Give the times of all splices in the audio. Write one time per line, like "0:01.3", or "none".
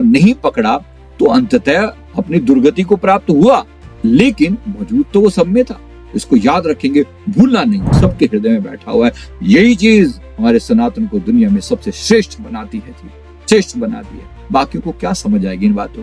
0:07.9